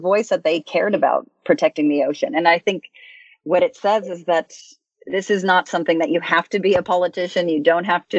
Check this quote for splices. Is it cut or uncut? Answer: uncut